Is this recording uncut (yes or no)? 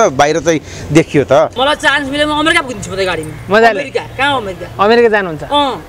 no